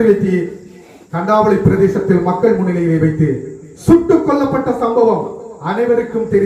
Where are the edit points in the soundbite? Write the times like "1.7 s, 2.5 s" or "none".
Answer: none